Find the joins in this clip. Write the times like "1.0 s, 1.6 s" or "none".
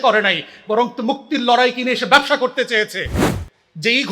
3.2 s